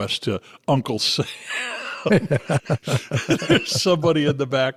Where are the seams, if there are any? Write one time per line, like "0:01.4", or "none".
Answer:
none